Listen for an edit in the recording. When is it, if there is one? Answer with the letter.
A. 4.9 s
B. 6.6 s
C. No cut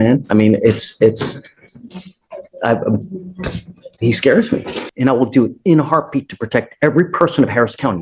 A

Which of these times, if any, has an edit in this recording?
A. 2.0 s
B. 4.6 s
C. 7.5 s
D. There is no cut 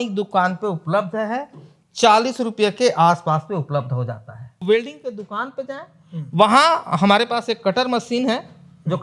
B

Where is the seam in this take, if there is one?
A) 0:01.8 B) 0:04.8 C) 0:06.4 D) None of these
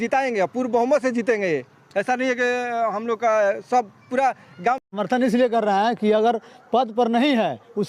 B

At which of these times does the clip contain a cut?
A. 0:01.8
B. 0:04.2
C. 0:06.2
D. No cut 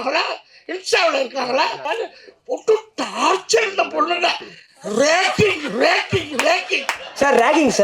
A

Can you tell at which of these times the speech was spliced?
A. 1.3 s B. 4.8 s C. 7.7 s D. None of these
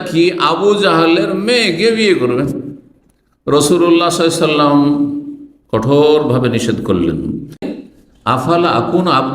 C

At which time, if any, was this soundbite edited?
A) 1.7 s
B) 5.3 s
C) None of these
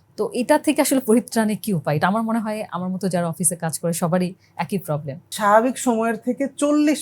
B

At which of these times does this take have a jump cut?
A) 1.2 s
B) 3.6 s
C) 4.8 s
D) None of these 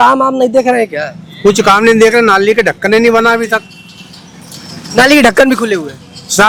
D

